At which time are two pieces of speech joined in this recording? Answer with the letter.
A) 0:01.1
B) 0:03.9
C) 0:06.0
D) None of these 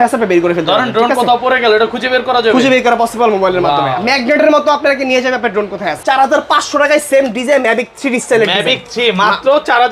C